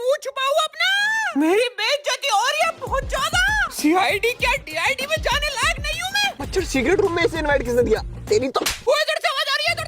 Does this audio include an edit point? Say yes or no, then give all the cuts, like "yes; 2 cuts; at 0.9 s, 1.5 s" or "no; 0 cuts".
yes; 2 cuts; at 6.4 s, 8.9 s